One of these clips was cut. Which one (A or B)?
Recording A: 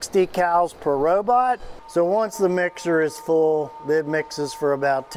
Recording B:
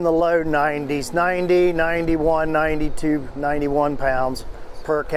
A